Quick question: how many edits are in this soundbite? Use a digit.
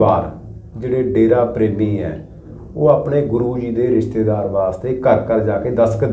0